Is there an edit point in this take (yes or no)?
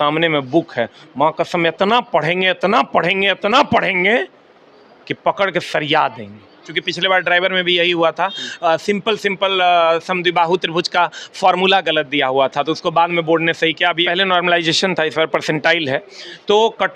yes